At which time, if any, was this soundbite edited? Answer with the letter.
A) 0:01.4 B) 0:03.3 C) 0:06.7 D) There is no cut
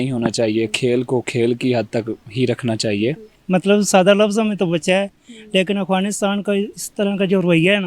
B